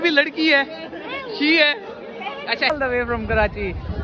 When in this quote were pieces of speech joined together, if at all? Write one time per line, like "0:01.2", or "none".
0:02.7